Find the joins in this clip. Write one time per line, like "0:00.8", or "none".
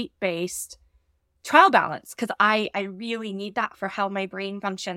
none